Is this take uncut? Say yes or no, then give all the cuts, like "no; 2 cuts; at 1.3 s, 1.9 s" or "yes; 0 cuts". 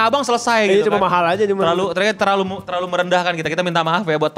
yes; 0 cuts